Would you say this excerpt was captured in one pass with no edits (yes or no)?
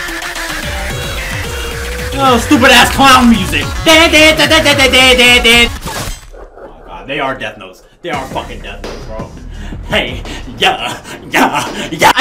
yes